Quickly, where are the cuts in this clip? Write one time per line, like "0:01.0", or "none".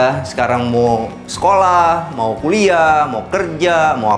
none

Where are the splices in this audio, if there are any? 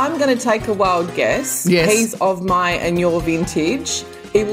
0:01.9

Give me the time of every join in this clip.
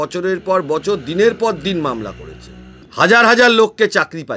0:02.9

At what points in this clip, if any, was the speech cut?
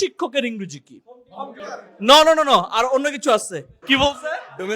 0:01.6
0:03.7

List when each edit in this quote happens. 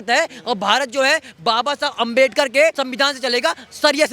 0:02.8

